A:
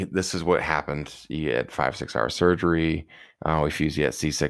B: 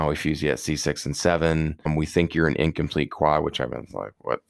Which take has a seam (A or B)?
B